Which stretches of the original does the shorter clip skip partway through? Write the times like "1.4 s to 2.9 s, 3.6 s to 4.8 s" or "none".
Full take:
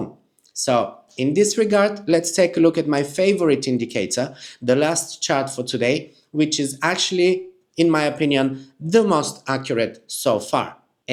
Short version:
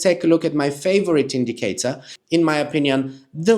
4.4 s to 7.6 s